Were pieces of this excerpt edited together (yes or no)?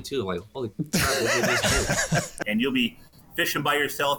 yes